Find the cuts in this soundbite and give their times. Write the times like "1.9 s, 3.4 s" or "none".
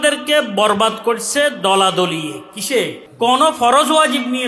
3.0 s